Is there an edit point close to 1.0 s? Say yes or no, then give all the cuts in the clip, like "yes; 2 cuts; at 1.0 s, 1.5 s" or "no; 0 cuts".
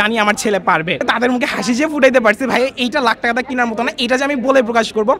yes; 1 cut; at 1.0 s